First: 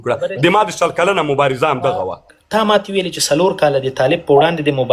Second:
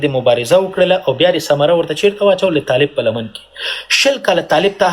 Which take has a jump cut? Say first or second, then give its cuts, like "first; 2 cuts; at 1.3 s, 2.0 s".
first; 1 cut; at 2.3 s